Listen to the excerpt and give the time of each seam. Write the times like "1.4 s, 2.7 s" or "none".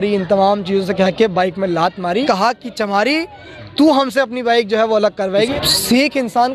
2.2 s, 5.5 s